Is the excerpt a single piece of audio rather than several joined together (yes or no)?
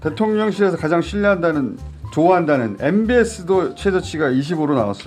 yes